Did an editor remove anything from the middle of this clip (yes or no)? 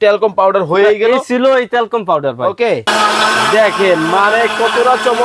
yes